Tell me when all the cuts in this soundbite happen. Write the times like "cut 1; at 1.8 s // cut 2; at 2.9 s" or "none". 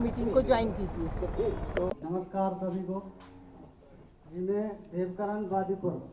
cut 1; at 1.9 s